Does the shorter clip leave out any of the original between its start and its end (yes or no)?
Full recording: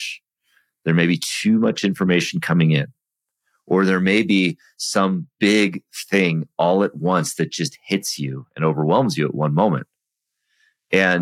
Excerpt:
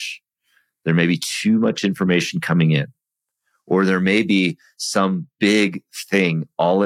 no